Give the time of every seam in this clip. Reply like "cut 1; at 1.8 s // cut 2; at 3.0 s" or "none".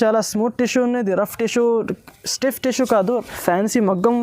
cut 1; at 3.3 s